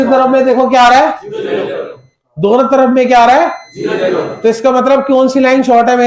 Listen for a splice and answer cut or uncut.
uncut